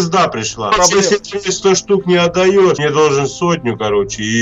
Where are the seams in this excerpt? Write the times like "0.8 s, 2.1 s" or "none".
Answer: 0.7 s, 2.8 s

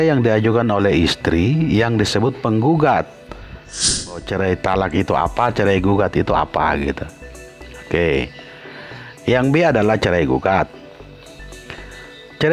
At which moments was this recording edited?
4.0 s

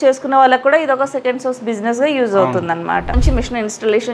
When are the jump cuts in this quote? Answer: 3.2 s

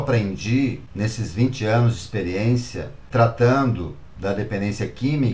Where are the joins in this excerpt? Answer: 0.8 s, 3.0 s

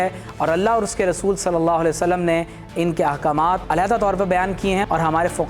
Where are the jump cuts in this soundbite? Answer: 3.6 s

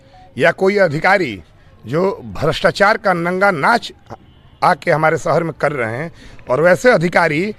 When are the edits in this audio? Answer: none

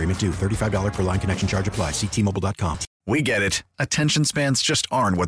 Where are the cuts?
2.9 s

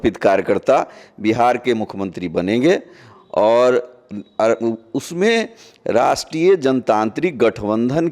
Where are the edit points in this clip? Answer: none

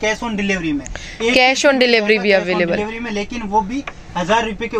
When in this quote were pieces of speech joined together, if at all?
none

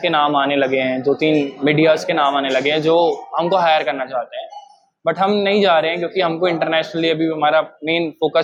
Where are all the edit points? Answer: none

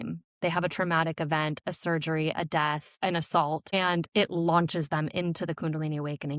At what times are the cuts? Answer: 2.9 s, 3.7 s

